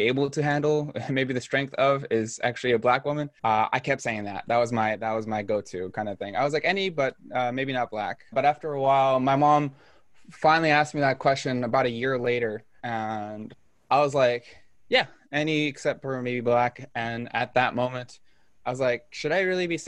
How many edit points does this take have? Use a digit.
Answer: 1